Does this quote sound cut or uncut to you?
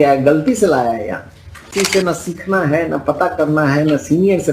cut